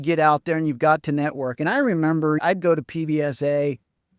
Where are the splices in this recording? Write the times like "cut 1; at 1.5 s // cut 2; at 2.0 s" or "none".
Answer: cut 1; at 2.4 s